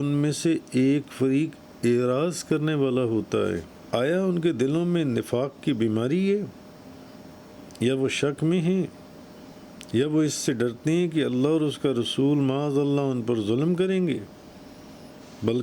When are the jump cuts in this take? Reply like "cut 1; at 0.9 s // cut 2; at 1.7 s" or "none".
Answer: cut 1; at 3.7 s